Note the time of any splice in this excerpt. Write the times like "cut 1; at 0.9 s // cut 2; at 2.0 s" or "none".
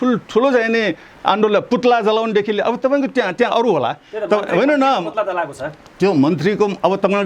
none